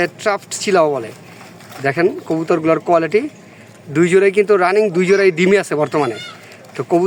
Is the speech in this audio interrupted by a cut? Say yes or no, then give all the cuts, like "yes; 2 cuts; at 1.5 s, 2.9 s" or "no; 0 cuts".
no; 0 cuts